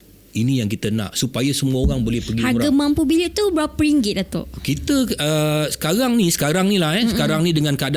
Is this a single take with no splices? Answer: yes; 0 cuts

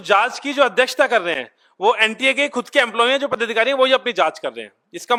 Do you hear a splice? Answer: no; 0 cuts

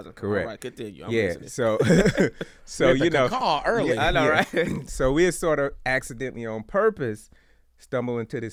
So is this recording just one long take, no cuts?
yes; 0 cuts

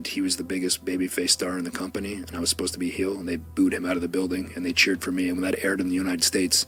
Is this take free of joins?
yes; 0 cuts

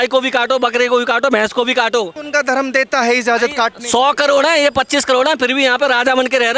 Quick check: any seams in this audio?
yes; 1 cut; at 2.2 s

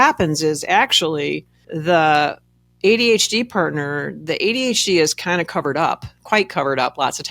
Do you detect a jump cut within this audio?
no; 0 cuts

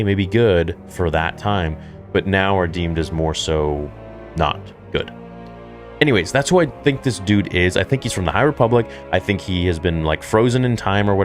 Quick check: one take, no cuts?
no; 1 cut; at 5.5 s

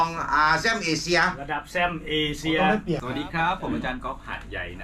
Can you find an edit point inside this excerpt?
yes; 1 cut; at 3.0 s

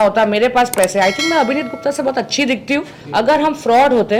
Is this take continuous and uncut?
no; 1 cut; at 3.0 s

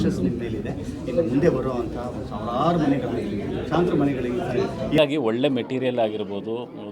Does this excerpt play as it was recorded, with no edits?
no; 1 cut; at 5.0 s

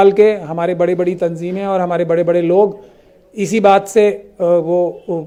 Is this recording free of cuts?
yes; 0 cuts

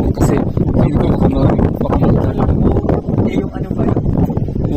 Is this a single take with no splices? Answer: yes; 0 cuts

